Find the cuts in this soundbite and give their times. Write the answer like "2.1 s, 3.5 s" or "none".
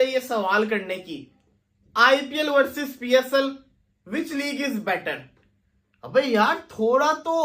none